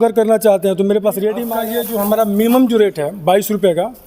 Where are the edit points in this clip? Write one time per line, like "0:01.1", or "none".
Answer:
0:01.5